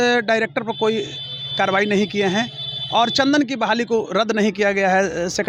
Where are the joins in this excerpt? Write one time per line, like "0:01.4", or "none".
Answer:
none